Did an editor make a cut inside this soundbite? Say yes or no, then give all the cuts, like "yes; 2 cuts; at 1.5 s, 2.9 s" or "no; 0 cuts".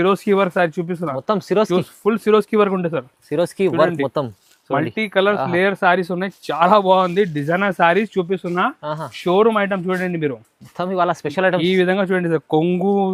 no; 0 cuts